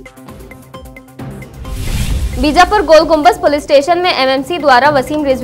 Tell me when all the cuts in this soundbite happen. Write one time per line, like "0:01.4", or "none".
none